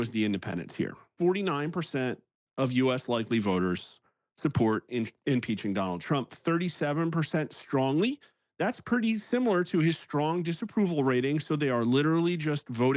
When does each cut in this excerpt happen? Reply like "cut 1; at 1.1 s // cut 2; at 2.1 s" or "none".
cut 1; at 1.1 s

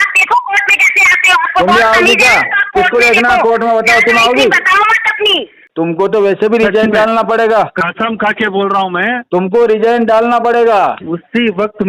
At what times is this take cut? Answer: cut 1; at 5.6 s

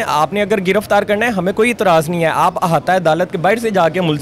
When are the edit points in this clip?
none

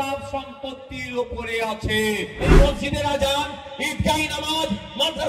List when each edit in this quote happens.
cut 1; at 2.5 s

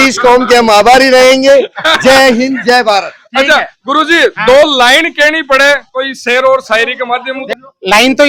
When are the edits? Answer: none

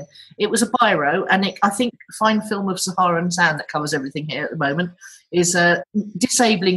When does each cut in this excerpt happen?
cut 1; at 1.9 s // cut 2; at 5.8 s

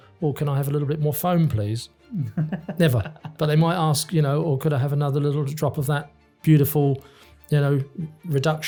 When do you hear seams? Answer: none

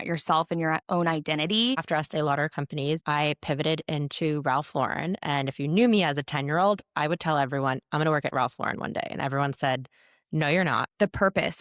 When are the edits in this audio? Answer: cut 1; at 1.8 s // cut 2; at 3.0 s // cut 3; at 10.9 s

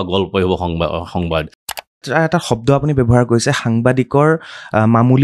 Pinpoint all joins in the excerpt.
cut 1; at 1.7 s

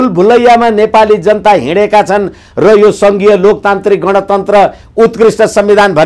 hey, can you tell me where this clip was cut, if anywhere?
none

